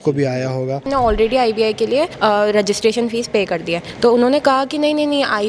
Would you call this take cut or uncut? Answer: cut